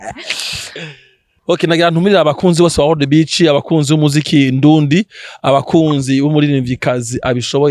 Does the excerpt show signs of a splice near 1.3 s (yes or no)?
yes